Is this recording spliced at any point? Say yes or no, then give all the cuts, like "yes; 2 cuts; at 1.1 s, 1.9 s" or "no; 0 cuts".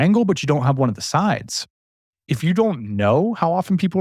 yes; 1 cut; at 1.8 s